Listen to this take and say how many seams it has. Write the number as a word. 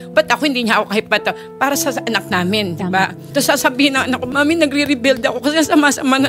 two